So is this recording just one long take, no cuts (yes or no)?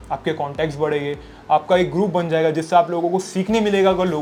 yes